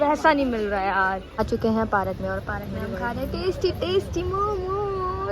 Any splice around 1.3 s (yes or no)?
yes